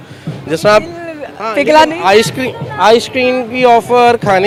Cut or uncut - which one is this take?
uncut